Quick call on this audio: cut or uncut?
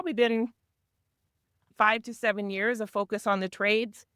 cut